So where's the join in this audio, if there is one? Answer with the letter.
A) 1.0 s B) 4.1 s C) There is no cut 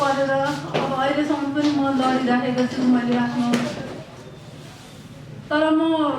B